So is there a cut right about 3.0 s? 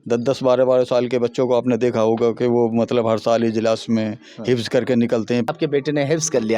no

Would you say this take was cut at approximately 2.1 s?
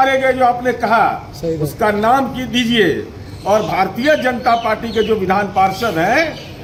no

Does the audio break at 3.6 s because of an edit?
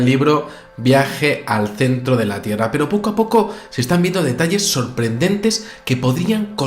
yes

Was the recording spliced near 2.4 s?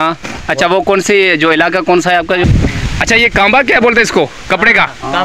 yes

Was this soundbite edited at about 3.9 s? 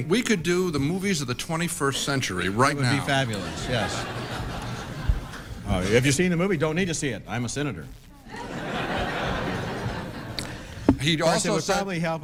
no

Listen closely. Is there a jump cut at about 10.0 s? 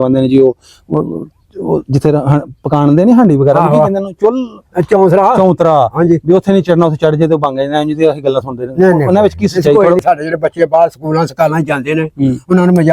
yes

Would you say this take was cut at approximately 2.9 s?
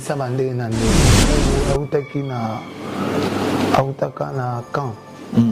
no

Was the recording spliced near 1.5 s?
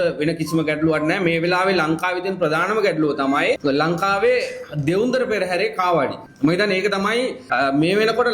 no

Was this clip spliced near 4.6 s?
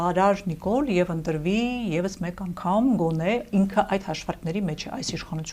no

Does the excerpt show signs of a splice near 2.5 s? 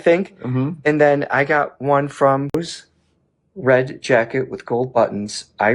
yes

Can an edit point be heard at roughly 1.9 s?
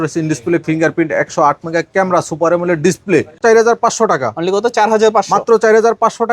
no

